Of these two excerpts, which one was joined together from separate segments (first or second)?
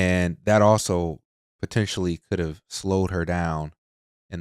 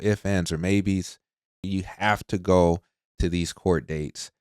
second